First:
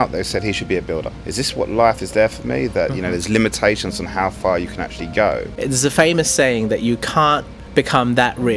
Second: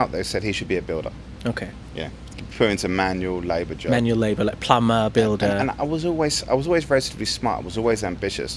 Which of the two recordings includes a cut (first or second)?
first